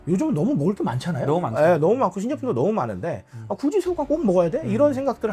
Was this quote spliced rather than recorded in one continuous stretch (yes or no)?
no